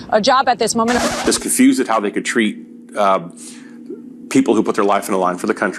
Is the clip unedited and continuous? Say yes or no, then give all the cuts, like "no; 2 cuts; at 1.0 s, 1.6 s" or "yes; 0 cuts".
no; 1 cut; at 1.0 s